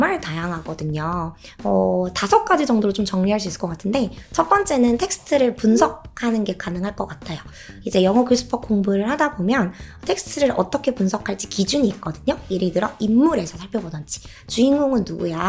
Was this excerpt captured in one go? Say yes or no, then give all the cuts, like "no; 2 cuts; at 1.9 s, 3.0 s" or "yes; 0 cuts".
yes; 0 cuts